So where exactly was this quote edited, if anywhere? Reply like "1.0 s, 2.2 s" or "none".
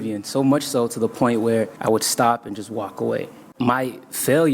1.7 s, 3.4 s